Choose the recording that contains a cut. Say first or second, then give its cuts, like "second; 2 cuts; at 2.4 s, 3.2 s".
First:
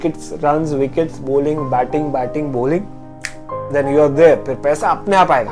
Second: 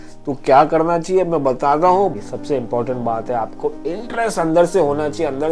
second; 1 cut; at 2.1 s